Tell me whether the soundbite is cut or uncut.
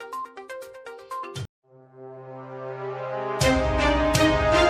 uncut